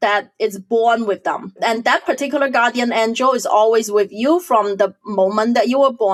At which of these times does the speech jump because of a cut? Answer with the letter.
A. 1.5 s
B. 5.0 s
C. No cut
C